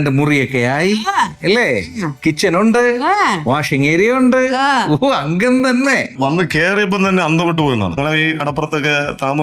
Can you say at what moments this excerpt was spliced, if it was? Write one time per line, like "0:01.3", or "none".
0:06.1
0:08.0